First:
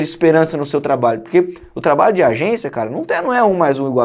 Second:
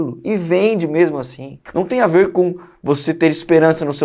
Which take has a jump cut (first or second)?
second